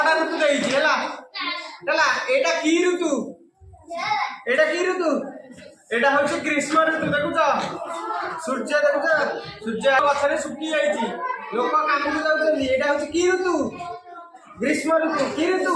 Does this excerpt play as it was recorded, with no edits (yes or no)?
no